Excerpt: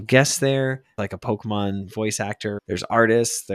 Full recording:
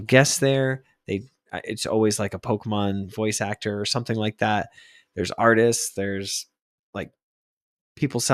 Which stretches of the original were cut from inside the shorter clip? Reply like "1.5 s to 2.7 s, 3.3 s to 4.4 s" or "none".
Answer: 1.0 s to 2.2 s, 3.8 s to 5.1 s